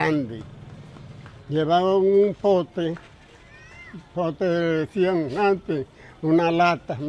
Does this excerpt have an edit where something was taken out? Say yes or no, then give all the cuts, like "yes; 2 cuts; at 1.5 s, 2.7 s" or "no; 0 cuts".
no; 0 cuts